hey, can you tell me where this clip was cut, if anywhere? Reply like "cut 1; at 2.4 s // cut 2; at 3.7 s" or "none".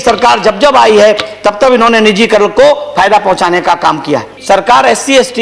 cut 1; at 4.3 s